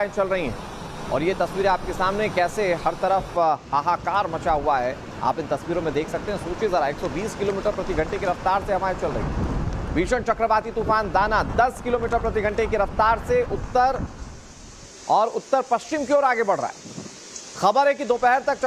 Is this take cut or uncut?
cut